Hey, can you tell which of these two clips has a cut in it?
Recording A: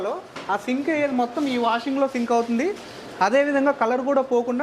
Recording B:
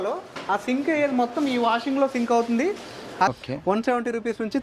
B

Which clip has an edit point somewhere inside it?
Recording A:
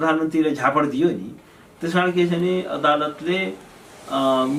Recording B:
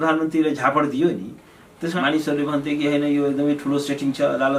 B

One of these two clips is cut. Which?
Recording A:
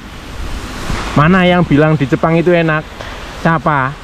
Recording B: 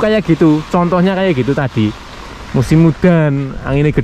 A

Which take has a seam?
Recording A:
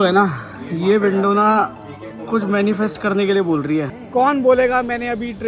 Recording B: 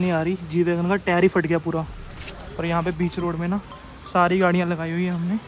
A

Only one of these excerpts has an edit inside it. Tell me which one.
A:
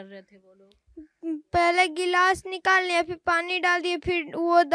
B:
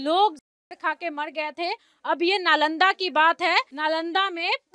B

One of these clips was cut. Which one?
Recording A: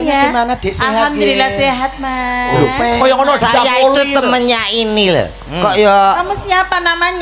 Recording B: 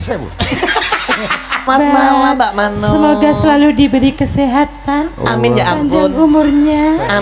B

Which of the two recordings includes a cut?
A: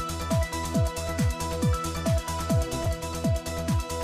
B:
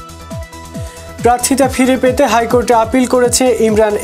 B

